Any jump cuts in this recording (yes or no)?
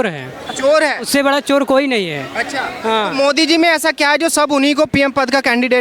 no